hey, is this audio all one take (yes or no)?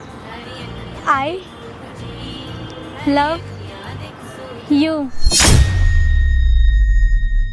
no